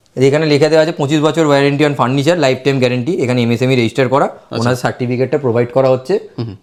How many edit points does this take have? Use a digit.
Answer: 0